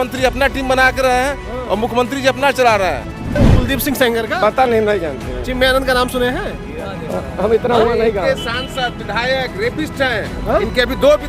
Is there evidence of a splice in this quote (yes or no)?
yes